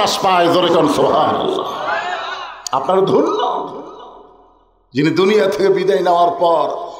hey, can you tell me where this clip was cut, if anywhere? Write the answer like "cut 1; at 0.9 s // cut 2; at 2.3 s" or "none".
none